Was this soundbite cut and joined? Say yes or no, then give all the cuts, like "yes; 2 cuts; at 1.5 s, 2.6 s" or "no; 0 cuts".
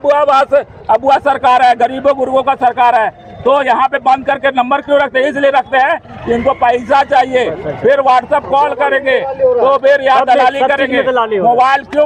no; 0 cuts